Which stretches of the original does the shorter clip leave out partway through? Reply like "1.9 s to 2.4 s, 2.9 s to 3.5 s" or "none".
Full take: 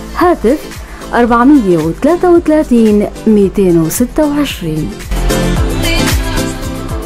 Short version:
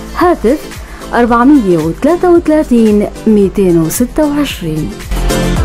none